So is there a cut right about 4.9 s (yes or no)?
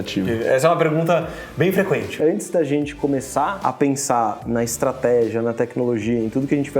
no